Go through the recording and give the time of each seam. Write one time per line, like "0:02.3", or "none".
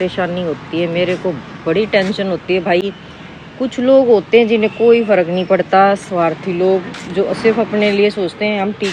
none